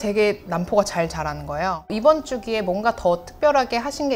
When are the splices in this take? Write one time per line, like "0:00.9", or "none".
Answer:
0:01.9